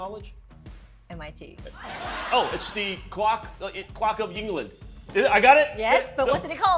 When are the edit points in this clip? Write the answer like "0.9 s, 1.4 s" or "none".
2.0 s